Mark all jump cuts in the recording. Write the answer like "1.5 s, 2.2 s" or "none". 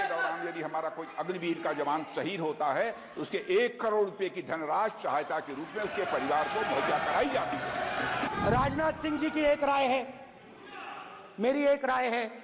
8.3 s